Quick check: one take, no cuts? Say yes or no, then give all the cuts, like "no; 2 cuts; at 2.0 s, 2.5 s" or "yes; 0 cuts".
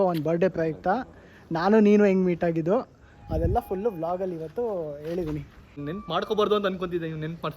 no; 1 cut; at 5.8 s